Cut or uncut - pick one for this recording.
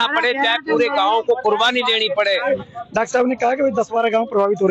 cut